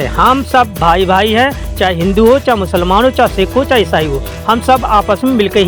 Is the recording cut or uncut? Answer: uncut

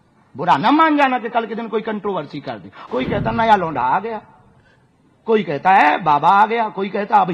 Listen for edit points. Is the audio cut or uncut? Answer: cut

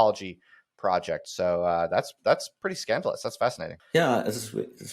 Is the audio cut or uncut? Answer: cut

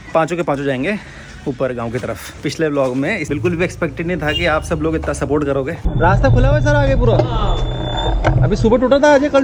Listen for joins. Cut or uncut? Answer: cut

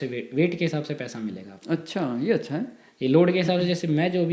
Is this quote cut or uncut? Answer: uncut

